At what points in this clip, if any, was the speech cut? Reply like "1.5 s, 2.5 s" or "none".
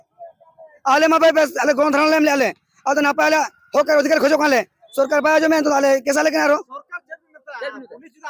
none